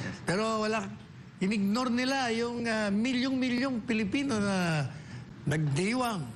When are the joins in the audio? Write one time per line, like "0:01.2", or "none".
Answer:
none